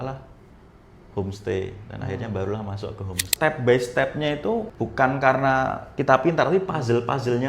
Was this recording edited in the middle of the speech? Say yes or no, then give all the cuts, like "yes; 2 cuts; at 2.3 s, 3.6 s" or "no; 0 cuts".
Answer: yes; 2 cuts; at 3.3 s, 4.7 s